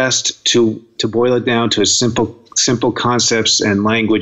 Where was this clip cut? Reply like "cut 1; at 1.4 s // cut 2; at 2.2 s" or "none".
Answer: cut 1; at 0.9 s